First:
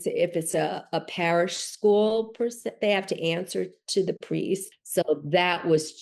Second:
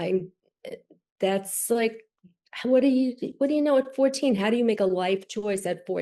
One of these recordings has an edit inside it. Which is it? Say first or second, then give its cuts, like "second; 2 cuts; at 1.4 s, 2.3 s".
first; 1 cut; at 4.8 s